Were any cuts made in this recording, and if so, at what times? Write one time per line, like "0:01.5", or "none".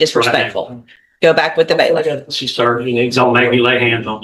none

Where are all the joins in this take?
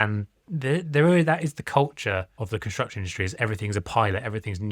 0:02.4

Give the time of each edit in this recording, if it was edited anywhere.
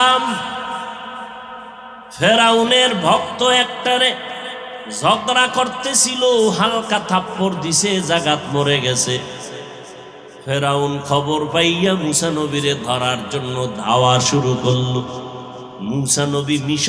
0:01.9

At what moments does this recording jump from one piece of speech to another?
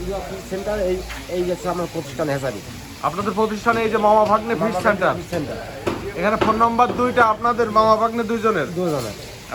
none

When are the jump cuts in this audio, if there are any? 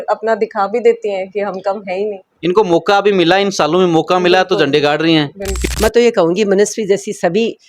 0:05.5

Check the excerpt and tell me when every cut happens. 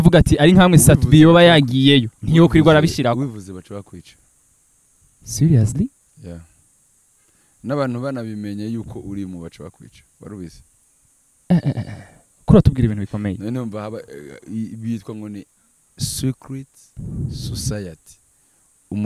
none

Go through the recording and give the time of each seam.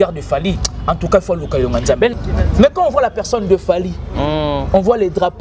0:02.2

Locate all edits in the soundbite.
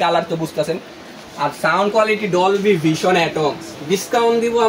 0:03.8

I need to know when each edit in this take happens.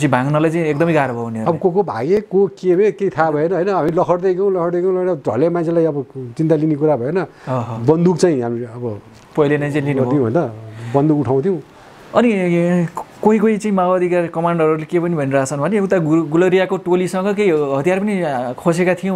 none

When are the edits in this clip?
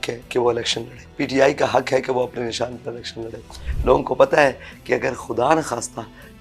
0:01.0
0:03.6

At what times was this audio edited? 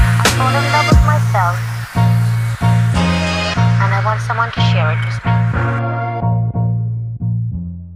none

